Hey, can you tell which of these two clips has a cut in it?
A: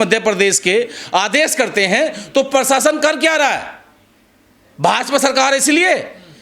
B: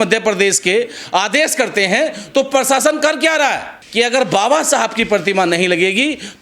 B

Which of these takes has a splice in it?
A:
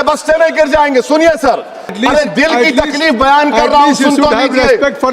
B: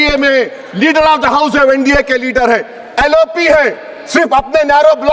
A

